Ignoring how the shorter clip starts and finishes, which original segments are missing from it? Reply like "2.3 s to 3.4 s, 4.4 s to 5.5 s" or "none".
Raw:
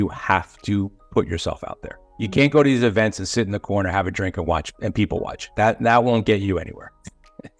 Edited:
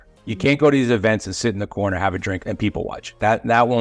4.3 s to 4.7 s